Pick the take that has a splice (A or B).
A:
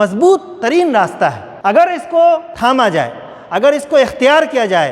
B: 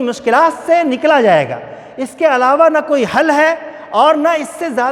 A